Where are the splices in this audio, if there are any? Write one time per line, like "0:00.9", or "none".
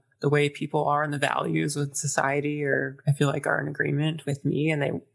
none